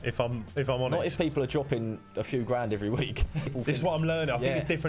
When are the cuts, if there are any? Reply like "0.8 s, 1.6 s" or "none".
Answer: 3.5 s